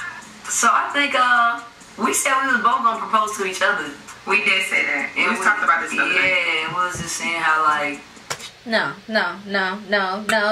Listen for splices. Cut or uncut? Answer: uncut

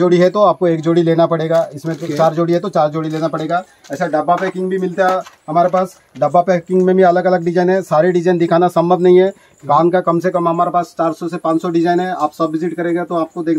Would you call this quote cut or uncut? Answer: uncut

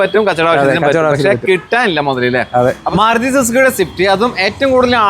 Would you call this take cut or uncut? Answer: cut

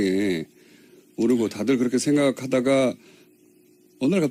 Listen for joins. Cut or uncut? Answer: uncut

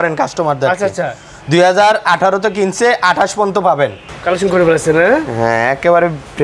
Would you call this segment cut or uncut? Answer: cut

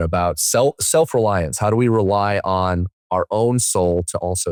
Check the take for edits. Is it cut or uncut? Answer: uncut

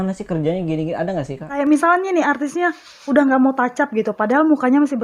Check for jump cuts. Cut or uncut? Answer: cut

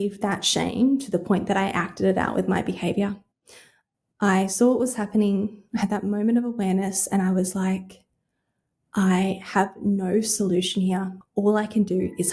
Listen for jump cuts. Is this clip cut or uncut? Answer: cut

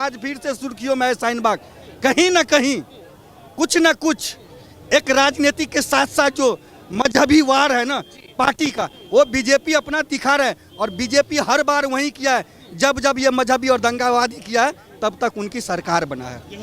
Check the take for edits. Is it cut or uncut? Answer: uncut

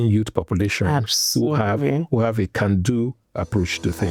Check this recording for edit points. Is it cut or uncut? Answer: uncut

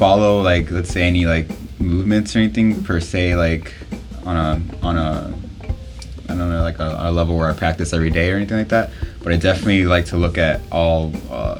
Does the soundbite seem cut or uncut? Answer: uncut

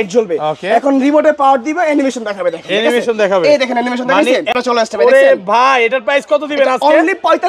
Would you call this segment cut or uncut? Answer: uncut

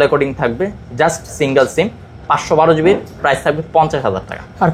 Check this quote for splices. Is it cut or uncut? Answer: uncut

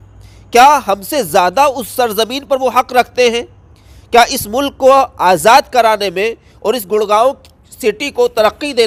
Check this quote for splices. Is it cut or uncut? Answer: uncut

